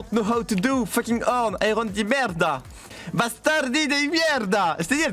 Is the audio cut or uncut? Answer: uncut